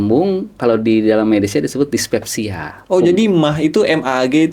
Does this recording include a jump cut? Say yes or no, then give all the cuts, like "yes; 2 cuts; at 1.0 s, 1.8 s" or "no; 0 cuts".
no; 0 cuts